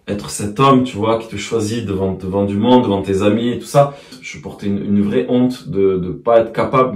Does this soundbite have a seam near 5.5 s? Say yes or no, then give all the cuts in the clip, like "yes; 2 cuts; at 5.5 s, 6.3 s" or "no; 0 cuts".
no; 2 cuts; at 2.2 s, 4.3 s